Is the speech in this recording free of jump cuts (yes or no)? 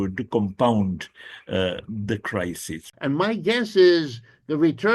no